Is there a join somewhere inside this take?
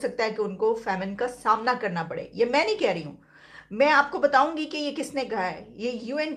no; 0 cuts

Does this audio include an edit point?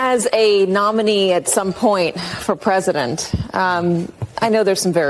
no; 0 cuts

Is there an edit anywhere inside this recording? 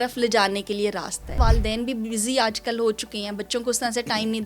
yes; 1 cut; at 1.3 s

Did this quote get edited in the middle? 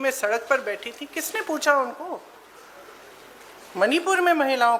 no; 0 cuts

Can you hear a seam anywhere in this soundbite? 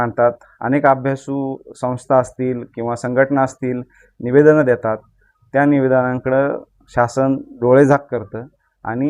no; 0 cuts

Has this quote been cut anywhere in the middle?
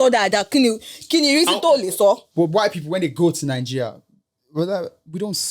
yes; 1 cut; at 2.3 s

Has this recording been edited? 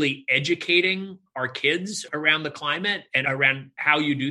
yes; 2 cuts; at 2.0 s, 3.2 s

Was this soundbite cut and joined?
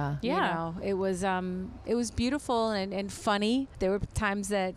yes; 1 cut; at 3.7 s

